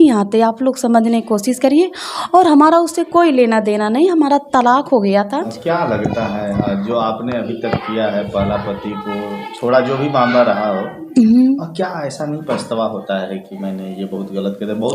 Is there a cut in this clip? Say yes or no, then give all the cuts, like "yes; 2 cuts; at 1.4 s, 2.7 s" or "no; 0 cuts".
yes; 1 cut; at 5.6 s